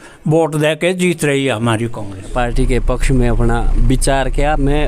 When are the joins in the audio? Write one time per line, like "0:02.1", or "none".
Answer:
0:02.3